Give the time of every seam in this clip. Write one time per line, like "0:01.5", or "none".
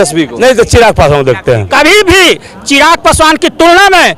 0:01.7